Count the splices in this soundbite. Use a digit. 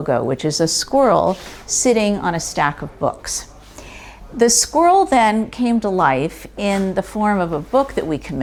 0